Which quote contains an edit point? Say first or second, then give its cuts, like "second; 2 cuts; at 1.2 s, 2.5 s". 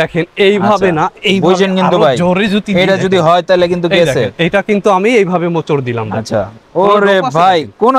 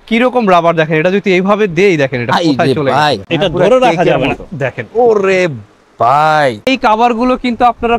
second; 2 cuts; at 3.3 s, 6.6 s